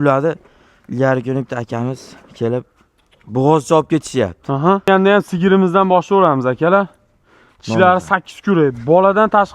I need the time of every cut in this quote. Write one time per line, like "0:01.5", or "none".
0:04.9